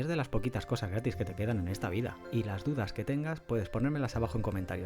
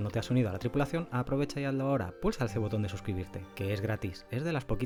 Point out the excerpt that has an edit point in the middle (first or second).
first